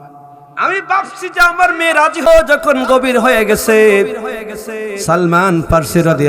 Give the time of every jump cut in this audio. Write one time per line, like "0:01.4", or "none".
0:02.3